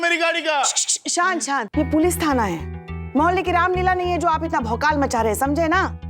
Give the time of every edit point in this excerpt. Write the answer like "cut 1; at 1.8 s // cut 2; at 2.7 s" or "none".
cut 1; at 1.7 s